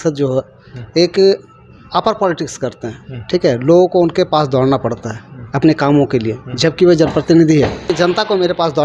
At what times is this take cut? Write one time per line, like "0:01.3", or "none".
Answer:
0:07.9